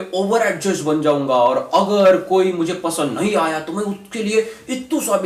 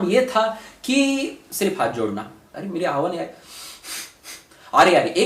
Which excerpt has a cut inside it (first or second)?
second